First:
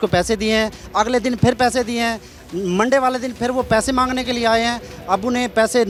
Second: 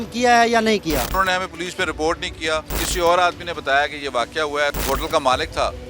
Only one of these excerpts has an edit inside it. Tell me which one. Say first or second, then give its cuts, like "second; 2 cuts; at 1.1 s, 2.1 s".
second; 3 cuts; at 1.1 s, 2.8 s, 4.8 s